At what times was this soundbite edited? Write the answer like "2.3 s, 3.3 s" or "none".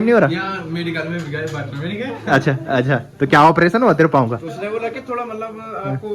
none